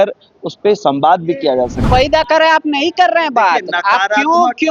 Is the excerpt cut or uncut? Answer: cut